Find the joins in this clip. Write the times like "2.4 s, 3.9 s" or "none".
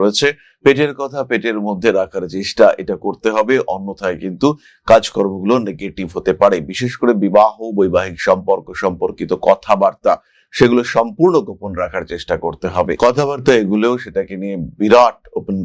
none

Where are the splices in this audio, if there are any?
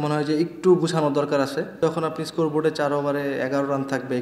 1.8 s

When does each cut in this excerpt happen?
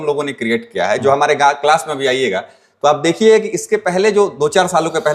none

